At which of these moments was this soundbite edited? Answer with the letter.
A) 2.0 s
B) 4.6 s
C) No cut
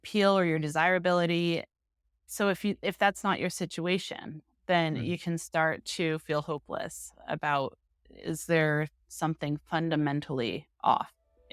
C